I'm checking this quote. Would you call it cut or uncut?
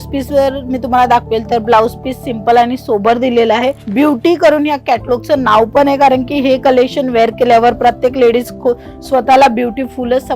cut